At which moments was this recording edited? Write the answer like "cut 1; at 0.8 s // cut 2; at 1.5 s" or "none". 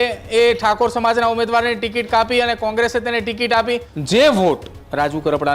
cut 1; at 3.9 s